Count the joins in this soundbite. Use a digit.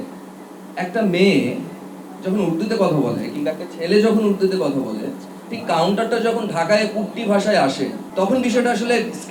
1